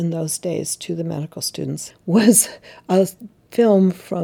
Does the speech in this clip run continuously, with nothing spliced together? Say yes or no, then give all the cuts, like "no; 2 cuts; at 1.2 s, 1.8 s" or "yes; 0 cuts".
no; 1 cut; at 1.9 s